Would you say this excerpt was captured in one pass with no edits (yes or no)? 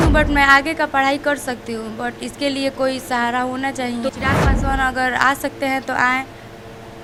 yes